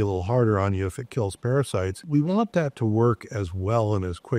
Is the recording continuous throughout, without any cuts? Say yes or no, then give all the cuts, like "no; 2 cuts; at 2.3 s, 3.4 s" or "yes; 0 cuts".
no; 1 cut; at 2.0 s